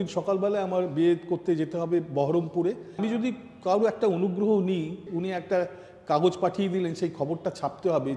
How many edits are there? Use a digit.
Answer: 2